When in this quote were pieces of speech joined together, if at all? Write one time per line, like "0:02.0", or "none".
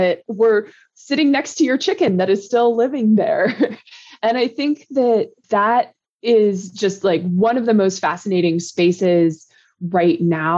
none